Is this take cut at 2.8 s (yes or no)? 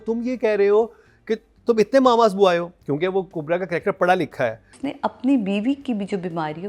no